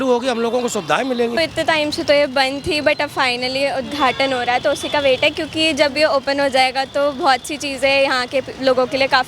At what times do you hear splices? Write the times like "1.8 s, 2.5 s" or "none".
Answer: 1.4 s